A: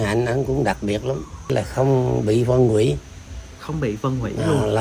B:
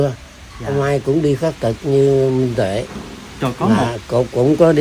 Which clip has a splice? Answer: A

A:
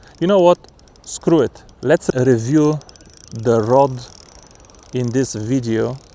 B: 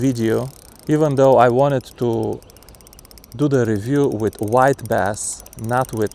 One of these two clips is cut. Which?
A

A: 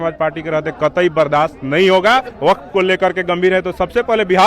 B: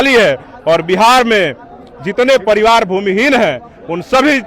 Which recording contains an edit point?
A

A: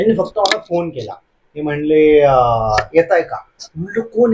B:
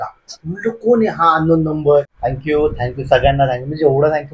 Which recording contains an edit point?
B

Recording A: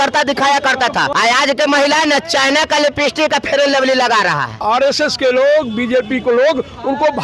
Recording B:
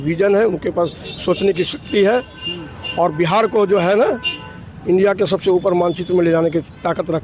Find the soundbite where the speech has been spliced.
A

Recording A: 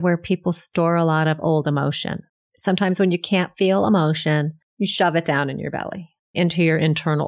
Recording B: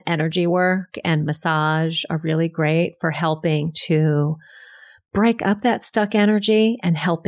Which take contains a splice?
A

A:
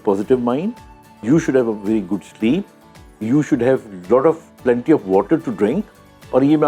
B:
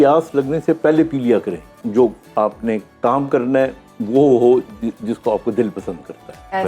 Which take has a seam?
B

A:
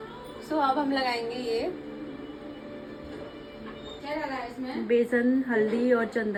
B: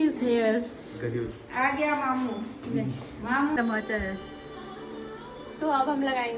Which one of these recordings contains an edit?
B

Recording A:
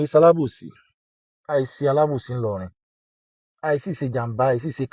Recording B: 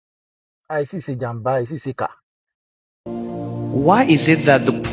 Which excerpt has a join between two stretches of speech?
B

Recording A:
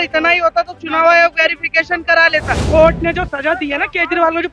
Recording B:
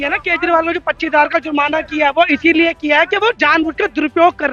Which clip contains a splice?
A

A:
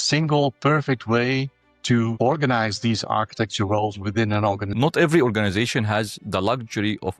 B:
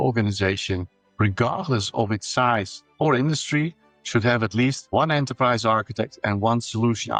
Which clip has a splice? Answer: A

